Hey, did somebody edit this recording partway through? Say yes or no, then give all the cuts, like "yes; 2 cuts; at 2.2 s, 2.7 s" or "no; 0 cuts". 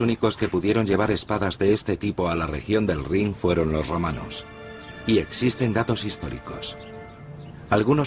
yes; 1 cut; at 2.6 s